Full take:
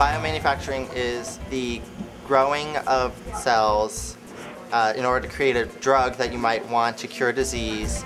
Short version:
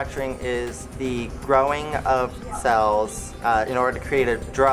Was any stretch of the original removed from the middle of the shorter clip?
yes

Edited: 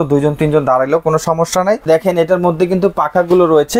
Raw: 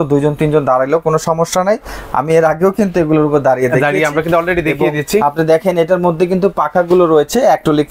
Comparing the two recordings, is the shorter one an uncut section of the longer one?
no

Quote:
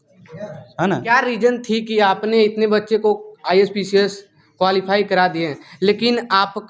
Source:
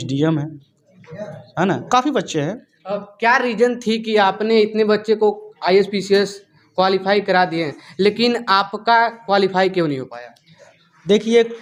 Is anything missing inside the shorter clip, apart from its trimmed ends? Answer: yes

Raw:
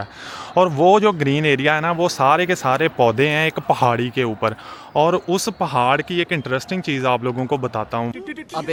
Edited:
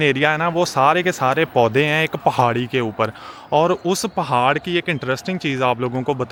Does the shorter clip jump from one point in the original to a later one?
no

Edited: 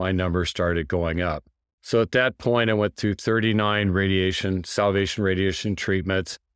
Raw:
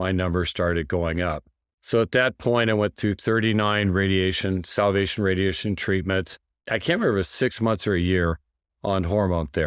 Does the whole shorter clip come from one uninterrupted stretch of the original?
yes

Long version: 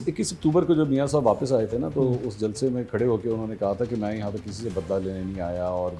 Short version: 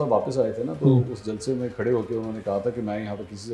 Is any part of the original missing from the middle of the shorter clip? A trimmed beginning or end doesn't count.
no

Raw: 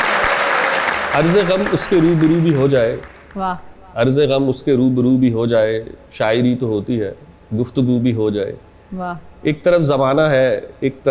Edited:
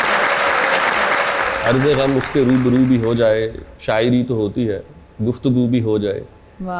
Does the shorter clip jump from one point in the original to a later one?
yes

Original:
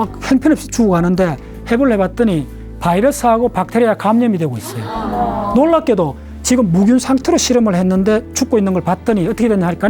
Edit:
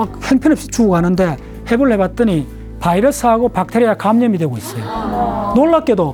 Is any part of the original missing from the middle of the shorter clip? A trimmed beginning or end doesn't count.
no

